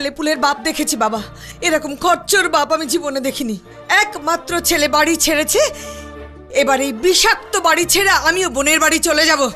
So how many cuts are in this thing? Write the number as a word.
zero